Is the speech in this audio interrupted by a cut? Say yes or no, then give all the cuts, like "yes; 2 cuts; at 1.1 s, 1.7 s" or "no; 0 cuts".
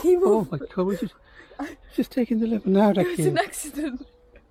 no; 0 cuts